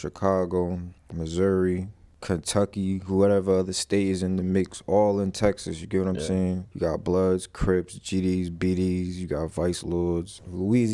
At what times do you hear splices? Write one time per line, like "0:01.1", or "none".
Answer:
none